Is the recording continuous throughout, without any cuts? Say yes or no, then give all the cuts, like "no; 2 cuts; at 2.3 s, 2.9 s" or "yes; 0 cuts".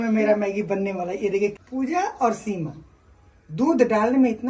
no; 1 cut; at 1.6 s